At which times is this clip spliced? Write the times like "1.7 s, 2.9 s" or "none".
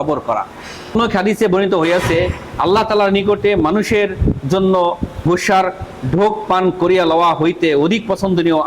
0.9 s